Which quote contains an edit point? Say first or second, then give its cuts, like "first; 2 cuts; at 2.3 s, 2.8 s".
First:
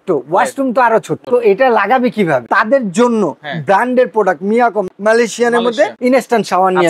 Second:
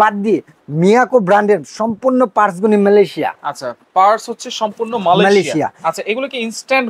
first; 4 cuts; at 1.2 s, 2.5 s, 4.9 s, 5.9 s